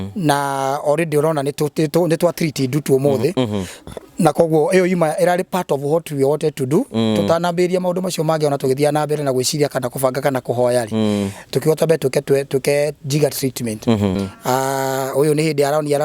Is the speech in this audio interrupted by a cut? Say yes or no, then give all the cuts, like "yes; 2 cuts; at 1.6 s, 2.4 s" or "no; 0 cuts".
yes; 1 cut; at 14.2 s